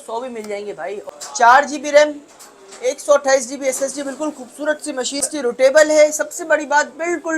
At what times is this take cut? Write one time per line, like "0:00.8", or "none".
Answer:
0:01.0
0:05.2